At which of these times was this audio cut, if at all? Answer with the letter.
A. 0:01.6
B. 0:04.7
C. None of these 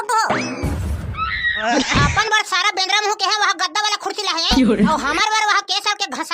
A